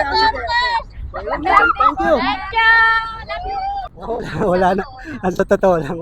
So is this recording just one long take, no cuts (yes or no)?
no